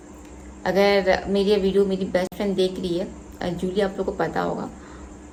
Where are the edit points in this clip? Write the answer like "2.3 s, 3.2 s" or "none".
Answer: none